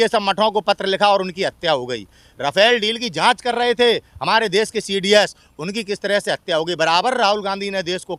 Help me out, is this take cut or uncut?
uncut